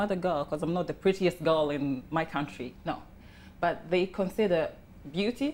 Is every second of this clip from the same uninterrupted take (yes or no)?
yes